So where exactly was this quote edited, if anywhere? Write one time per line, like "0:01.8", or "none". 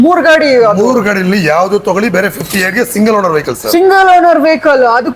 none

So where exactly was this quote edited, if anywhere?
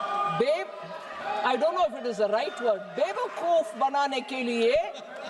none

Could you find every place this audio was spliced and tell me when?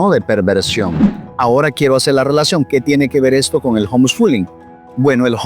0:01.2

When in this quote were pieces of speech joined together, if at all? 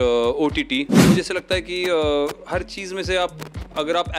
0:01.0

